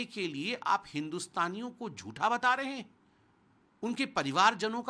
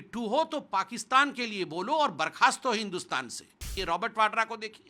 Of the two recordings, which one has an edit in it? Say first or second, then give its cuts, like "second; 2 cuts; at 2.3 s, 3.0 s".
second; 1 cut; at 3.7 s